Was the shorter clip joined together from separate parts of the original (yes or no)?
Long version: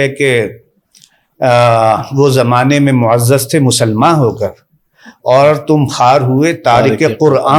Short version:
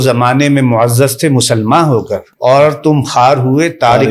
yes